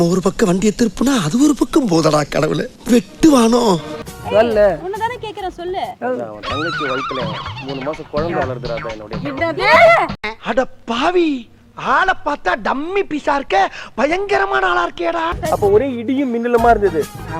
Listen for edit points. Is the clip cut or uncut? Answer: cut